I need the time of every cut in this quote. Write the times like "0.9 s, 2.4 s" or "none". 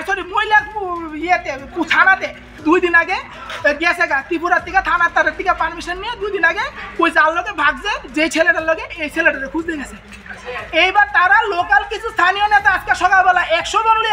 2.5 s